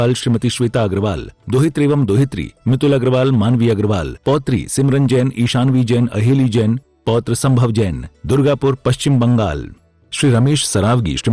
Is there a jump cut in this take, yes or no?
yes